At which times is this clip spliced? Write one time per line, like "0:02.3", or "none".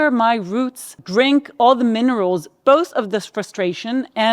0:01.0